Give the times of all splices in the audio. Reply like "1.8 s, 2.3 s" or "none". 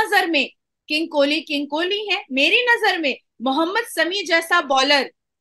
none